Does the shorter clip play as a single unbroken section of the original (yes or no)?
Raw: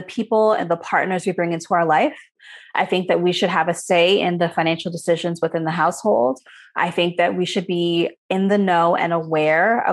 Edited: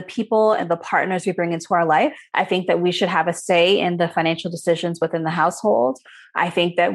no